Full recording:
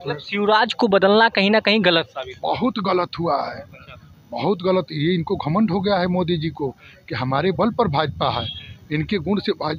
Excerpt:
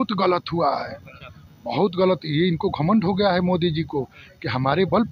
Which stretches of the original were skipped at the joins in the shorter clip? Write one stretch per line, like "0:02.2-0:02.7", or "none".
none

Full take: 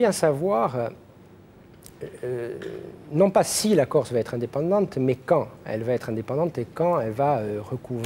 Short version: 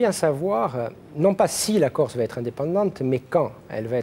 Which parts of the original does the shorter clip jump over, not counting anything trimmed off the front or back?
0:01.0-0:03.0

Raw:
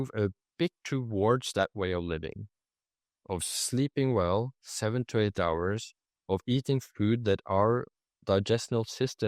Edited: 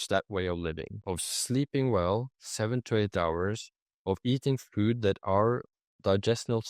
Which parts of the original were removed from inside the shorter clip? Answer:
0:02.4-0:03.1

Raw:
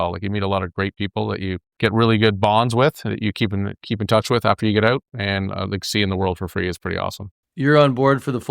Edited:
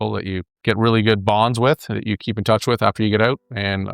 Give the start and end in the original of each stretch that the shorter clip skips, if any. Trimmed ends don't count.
0:03.3-0:03.8

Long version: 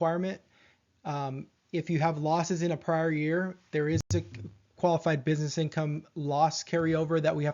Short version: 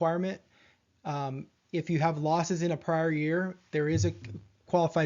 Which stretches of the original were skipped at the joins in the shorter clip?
0:04.0-0:04.1

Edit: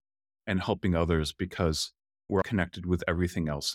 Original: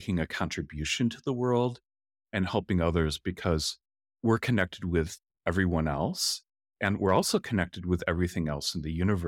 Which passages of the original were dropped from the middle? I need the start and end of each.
0:04.2-0:07.4

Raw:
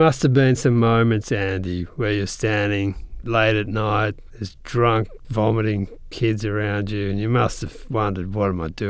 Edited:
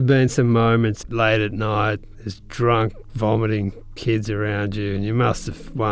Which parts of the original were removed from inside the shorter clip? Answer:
0:01.2-0:03.1

